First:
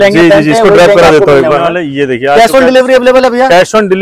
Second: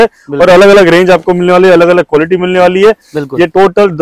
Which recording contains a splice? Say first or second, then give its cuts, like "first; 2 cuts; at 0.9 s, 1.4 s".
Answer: first; 1 cut; at 1.7 s